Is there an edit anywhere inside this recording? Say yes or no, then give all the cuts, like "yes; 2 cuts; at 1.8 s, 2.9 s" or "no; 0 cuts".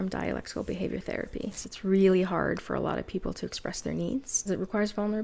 yes; 2 cuts; at 1.6 s, 4.4 s